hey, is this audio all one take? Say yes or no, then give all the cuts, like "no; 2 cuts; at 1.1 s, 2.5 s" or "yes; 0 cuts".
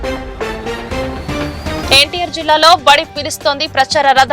no; 1 cut; at 1.8 s